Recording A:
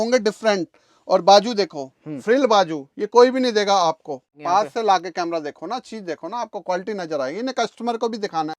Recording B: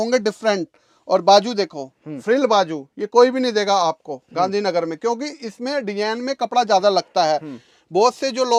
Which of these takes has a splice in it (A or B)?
A